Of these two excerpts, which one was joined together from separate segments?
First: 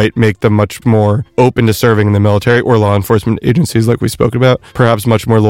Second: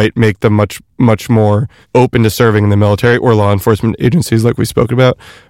first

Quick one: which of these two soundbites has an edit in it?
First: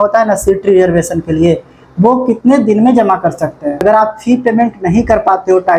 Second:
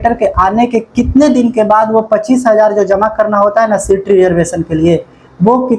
first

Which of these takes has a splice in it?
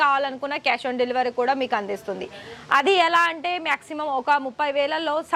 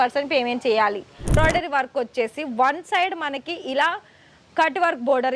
second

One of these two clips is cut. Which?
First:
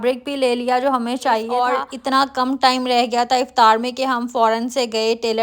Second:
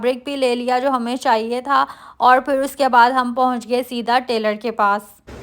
first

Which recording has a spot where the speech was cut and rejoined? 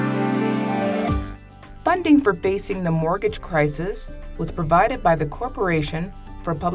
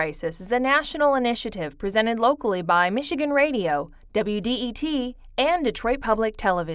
first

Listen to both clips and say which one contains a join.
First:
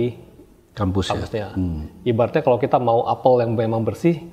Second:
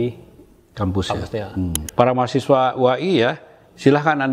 second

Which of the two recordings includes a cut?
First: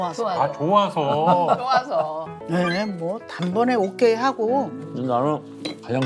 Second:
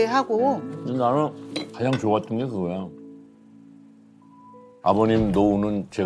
first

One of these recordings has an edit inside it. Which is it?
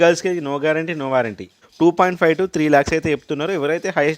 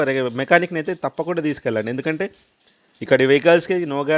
first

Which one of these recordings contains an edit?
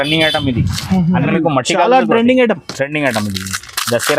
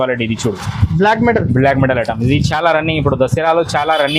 first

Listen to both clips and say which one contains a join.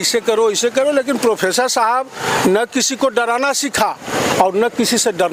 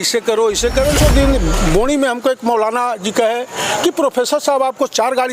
second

